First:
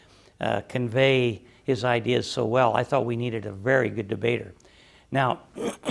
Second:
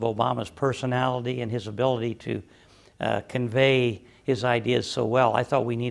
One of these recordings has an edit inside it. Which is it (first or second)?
second